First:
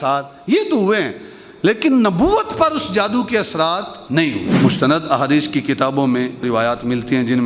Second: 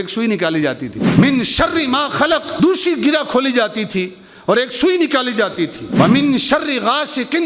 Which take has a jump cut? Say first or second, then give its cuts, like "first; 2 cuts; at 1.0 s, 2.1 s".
first; 1 cut; at 4.5 s